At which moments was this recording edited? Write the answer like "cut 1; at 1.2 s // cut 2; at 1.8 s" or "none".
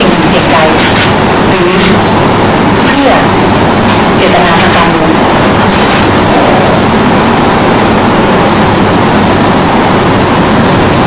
none